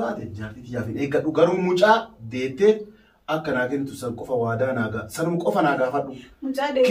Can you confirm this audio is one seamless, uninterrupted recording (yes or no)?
yes